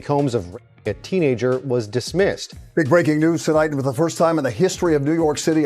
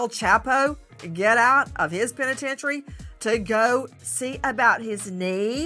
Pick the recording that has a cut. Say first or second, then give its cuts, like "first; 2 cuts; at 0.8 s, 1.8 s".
first; 1 cut; at 2.6 s